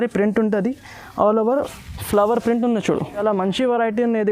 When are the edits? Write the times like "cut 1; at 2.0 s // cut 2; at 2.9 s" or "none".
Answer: cut 1; at 3.2 s